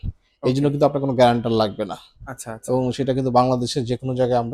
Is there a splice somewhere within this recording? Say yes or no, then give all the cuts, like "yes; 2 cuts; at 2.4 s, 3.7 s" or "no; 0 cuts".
no; 0 cuts